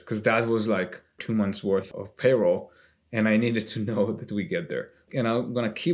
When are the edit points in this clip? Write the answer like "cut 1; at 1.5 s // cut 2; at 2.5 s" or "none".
cut 1; at 1.2 s // cut 2; at 1.9 s // cut 3; at 5.1 s